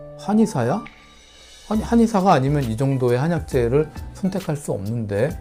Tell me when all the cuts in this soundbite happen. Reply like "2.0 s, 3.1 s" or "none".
none